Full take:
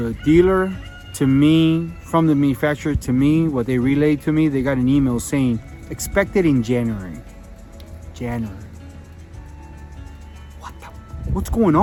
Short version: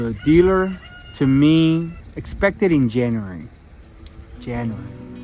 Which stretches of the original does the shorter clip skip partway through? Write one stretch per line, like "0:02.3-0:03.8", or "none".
0:02.0-0:05.7